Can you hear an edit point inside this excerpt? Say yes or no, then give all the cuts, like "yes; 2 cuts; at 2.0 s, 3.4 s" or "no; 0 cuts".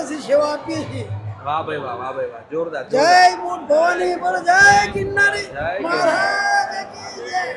no; 0 cuts